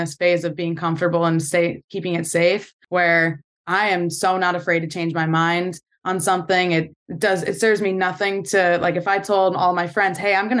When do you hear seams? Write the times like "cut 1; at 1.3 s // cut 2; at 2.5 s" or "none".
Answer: cut 1; at 2.7 s // cut 2; at 7.0 s